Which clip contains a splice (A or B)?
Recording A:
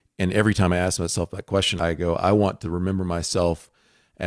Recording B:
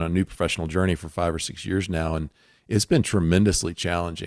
A